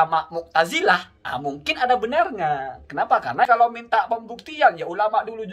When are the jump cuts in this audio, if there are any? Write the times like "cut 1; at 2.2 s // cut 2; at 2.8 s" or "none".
cut 1; at 3.5 s